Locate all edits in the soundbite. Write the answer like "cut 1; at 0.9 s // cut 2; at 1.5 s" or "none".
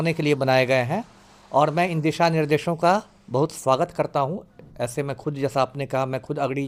none